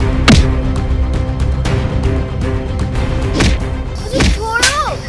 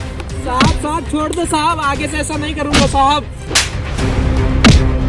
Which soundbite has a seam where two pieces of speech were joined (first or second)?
first